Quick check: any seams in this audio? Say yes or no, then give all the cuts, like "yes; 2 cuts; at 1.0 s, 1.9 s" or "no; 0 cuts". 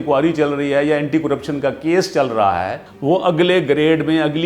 yes; 1 cut; at 2.9 s